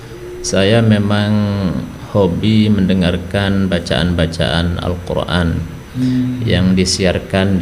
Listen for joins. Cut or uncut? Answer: uncut